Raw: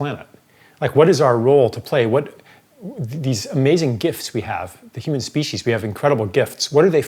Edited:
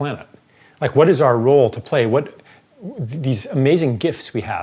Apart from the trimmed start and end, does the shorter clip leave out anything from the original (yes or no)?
no